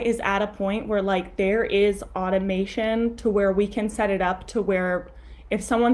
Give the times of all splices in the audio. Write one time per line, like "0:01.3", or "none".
none

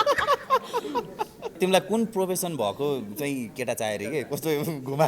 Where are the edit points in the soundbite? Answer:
0:01.5

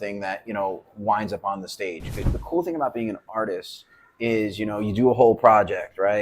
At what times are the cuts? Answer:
0:02.3

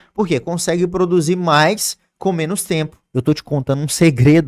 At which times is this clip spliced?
0:03.0

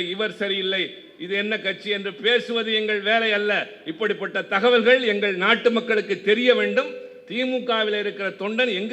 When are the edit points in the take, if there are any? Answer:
none

